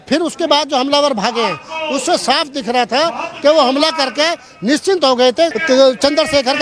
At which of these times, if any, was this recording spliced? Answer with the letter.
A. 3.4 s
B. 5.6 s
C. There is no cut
B